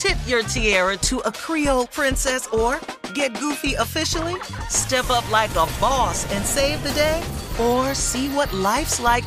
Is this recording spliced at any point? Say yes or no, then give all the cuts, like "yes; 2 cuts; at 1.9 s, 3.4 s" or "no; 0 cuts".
no; 0 cuts